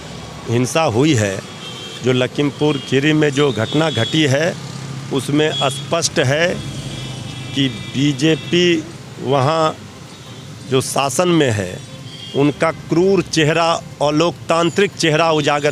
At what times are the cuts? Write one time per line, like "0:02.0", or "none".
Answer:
none